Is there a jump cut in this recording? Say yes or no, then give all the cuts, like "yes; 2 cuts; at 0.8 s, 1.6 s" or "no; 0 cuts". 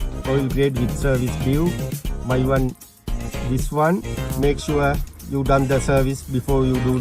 yes; 1 cut; at 4.1 s